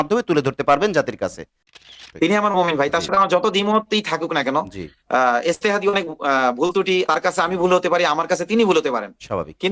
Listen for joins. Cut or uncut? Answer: cut